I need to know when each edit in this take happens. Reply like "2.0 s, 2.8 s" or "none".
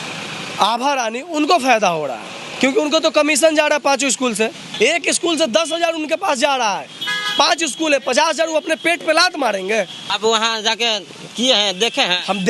4.6 s, 10.0 s